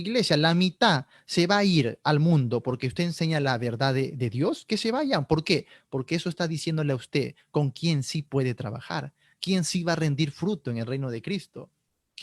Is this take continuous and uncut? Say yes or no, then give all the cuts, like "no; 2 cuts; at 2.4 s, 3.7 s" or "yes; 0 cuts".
yes; 0 cuts